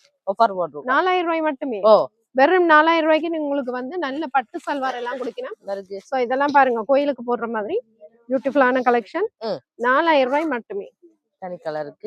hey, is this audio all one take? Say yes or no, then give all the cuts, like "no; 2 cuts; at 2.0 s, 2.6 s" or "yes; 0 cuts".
yes; 0 cuts